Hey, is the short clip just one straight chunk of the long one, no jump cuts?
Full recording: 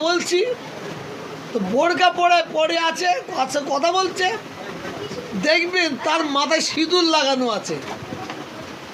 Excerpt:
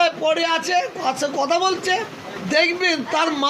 no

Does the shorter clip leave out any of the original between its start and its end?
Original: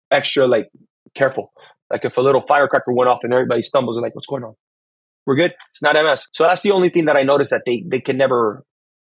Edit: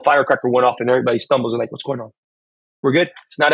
no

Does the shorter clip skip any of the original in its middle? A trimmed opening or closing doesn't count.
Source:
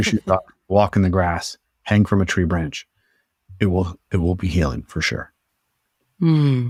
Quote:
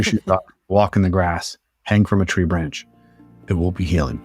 yes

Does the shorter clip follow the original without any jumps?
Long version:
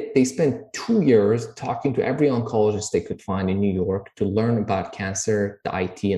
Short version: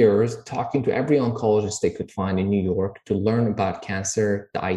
yes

